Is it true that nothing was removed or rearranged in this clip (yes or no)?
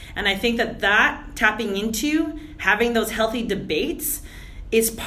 yes